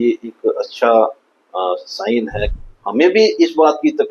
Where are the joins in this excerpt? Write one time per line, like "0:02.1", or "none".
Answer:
0:02.5